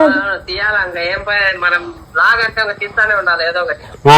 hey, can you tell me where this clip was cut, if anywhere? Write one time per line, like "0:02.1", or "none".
none